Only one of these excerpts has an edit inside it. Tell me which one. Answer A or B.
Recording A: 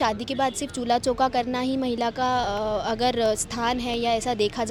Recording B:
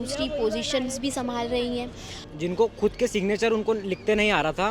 B